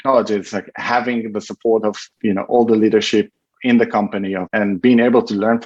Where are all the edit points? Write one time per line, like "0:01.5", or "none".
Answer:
0:02.1
0:04.5